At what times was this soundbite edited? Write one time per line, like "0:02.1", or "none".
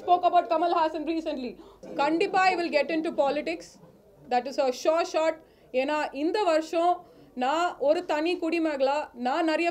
0:01.8